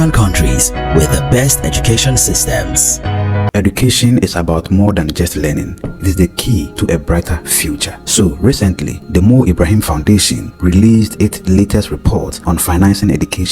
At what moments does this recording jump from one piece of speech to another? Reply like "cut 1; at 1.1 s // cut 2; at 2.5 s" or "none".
cut 1; at 3.5 s